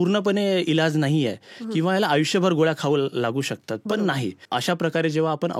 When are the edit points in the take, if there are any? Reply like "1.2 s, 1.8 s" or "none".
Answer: 4.4 s